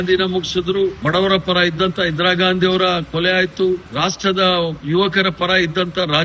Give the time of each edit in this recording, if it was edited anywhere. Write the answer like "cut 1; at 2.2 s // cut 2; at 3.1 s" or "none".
cut 1; at 1.0 s // cut 2; at 3.9 s

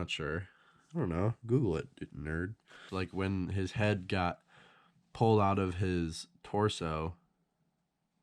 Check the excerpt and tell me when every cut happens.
cut 1; at 2.8 s

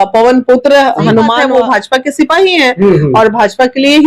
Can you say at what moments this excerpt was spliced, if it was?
cut 1; at 1.4 s

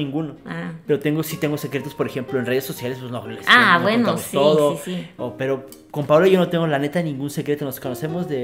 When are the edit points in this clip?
none

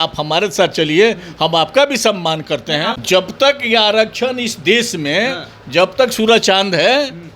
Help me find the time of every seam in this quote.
cut 1; at 3.0 s

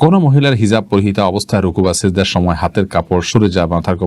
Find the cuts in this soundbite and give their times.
none

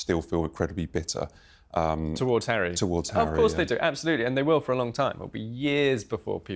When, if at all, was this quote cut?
none

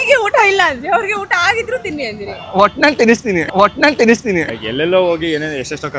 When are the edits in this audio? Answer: cut 1; at 4.5 s

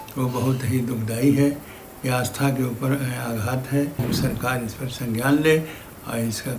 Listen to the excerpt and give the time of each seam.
cut 1; at 4.0 s

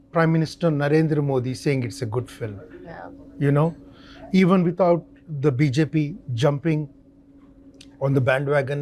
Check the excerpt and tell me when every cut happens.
none

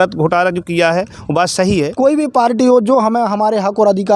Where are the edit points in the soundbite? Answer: cut 1; at 1.9 s

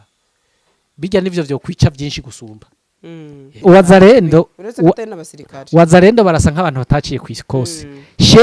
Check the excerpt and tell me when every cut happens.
cut 1; at 3.6 s

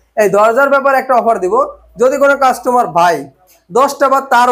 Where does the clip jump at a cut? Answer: none

